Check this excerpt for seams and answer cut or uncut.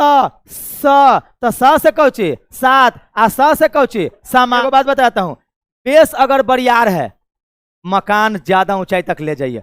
cut